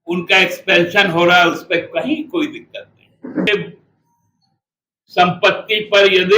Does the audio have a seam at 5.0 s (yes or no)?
no